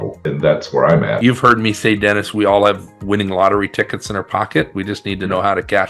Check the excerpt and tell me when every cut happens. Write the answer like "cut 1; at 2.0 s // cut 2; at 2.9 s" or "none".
cut 1; at 1.2 s